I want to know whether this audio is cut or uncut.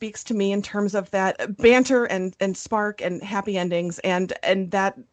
cut